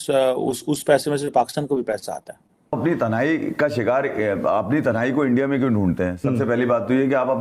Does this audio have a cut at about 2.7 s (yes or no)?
yes